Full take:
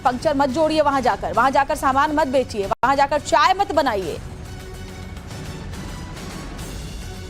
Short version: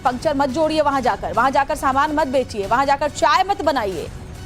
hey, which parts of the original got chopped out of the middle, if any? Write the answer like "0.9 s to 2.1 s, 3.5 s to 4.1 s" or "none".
2.7 s to 2.8 s